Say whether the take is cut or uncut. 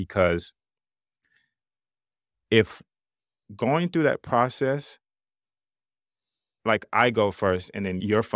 uncut